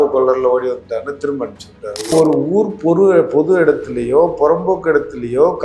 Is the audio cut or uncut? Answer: cut